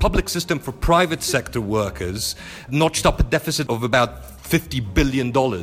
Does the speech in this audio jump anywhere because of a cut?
yes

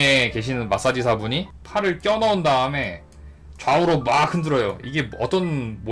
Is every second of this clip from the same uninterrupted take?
no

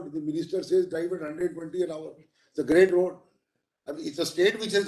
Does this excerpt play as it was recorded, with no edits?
yes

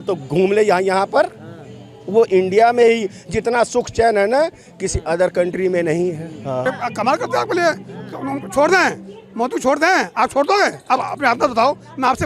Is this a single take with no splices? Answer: yes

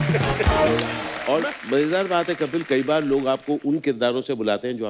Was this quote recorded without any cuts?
no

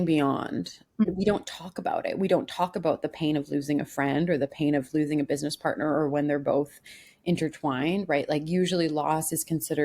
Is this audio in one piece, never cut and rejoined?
no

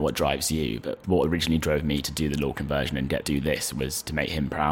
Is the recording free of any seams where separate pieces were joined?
no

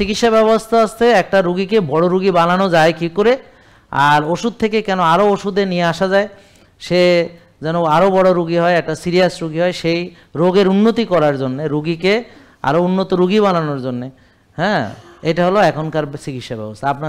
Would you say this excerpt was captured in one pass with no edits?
yes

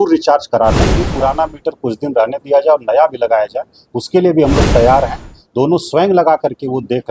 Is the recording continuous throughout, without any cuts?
no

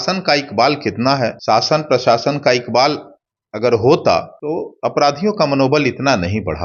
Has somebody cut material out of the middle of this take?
yes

